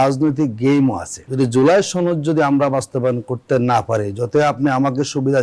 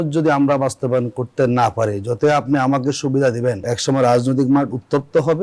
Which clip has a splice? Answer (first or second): first